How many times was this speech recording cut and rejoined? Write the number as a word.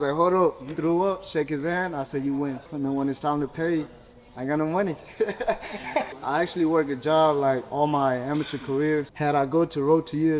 three